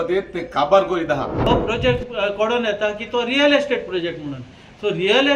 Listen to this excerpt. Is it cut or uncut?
cut